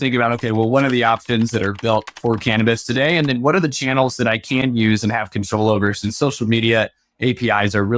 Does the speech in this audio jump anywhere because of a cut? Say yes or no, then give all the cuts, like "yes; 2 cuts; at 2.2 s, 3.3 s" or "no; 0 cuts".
no; 0 cuts